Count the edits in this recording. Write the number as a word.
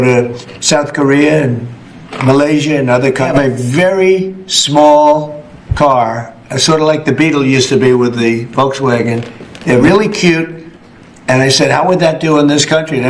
two